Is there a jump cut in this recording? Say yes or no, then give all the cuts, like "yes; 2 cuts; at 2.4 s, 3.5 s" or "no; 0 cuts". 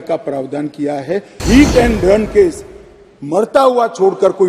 yes; 1 cut; at 1.4 s